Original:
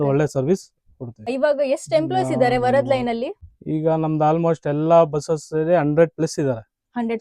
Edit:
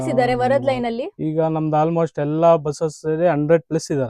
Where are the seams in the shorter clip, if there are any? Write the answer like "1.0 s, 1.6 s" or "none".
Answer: 1.1 s

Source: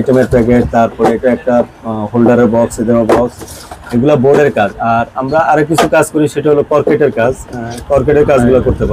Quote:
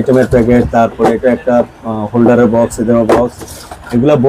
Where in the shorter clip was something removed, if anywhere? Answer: none

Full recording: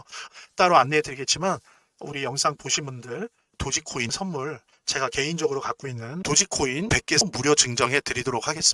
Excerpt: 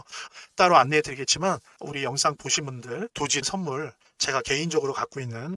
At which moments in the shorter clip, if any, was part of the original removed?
1.8 s, 3.4 s

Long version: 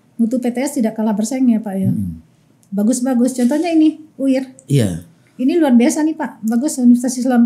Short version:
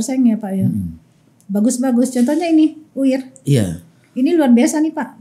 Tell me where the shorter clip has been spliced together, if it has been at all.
none

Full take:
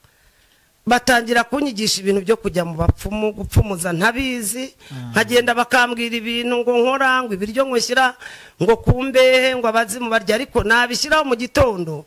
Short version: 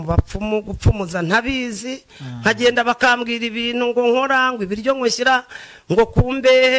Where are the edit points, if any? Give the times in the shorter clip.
none

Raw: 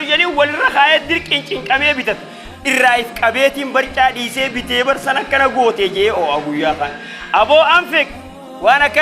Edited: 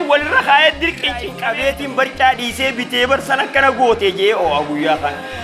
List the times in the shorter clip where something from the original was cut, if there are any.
1.3 s

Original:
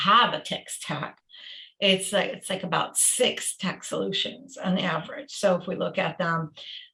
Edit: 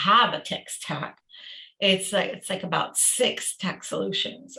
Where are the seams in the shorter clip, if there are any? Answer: none

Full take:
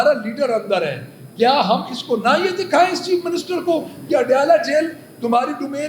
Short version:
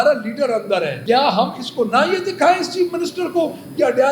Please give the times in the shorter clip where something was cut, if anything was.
0.9 s

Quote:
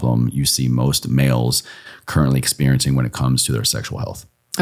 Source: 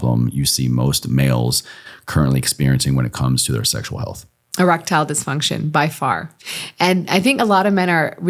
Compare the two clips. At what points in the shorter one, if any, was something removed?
none

